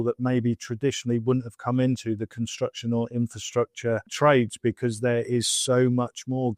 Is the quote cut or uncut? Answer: cut